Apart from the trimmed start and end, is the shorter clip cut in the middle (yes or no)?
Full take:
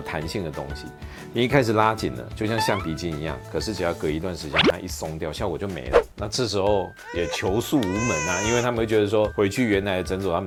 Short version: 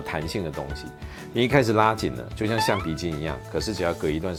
no